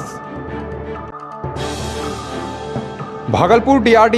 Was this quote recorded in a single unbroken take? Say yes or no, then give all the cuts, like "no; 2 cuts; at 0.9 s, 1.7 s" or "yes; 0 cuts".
yes; 0 cuts